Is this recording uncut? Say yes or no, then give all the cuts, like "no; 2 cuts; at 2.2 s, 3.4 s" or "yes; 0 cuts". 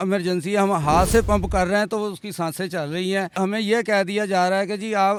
yes; 0 cuts